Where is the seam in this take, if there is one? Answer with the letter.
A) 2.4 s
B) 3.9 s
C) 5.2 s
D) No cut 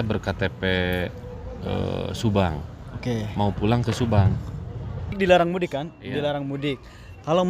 C